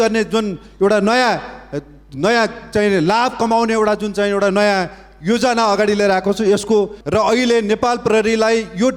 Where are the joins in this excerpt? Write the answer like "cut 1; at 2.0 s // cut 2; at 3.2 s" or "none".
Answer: cut 1; at 7.0 s